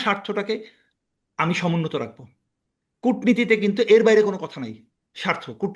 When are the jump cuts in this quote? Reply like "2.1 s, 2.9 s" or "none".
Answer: none